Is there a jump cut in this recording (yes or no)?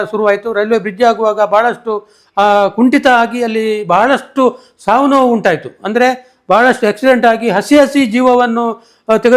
no